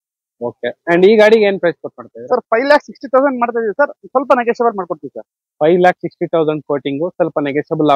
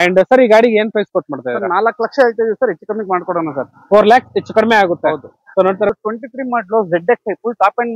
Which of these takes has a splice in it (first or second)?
second